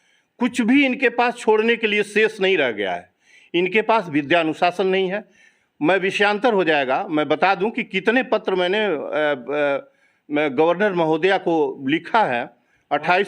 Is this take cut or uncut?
uncut